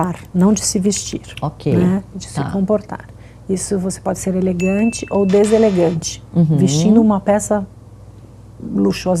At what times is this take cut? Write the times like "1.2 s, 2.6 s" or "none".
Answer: none